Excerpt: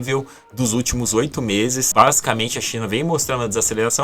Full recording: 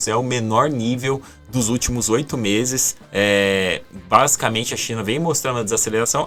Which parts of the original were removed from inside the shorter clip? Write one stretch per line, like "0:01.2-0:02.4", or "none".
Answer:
0:02.8-0:04.0